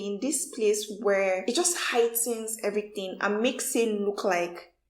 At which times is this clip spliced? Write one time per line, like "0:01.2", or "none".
0:01.4